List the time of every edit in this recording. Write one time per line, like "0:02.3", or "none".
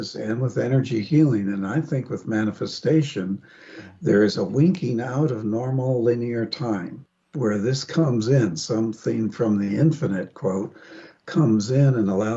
none